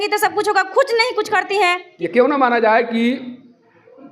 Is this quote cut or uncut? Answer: cut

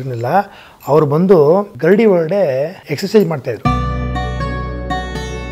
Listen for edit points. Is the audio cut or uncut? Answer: cut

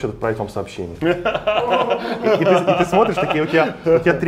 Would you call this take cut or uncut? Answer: uncut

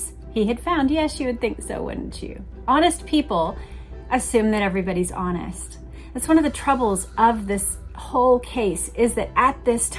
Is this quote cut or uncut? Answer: uncut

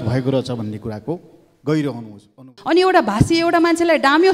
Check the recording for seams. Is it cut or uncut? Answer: cut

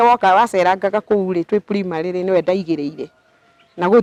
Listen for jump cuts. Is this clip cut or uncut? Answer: uncut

